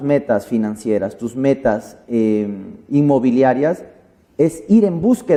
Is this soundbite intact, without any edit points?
yes; 0 cuts

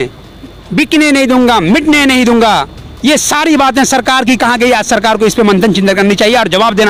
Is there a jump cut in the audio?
no; 0 cuts

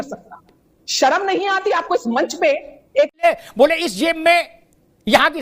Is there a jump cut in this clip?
yes; 1 cut; at 3.2 s

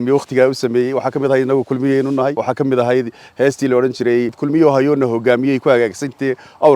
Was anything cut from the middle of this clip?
yes; 2 cuts; at 2.4 s, 4.4 s

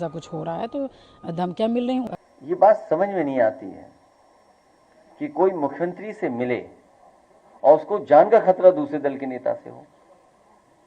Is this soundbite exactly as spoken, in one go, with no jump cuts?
no; 1 cut; at 2.1 s

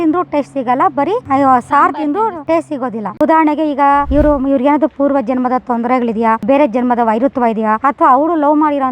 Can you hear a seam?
yes; 1 cut; at 3.1 s

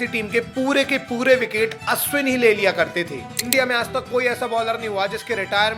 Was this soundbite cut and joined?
yes; 1 cut; at 3.2 s

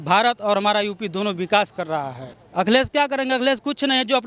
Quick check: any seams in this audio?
yes; 1 cut; at 2.2 s

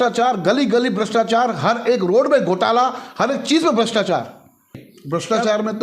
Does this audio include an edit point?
yes; 1 cut; at 4.8 s

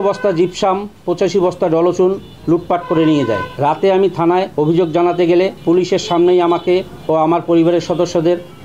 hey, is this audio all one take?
no; 3 cuts; at 3.5 s, 4.5 s, 5.6 s

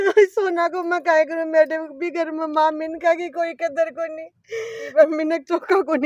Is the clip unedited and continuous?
no; 1 cut; at 4.8 s

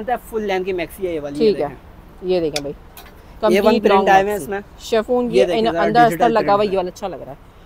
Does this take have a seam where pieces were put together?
no; 0 cuts

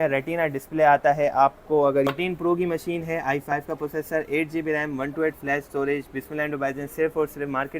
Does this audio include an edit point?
yes; 1 cut; at 2.1 s

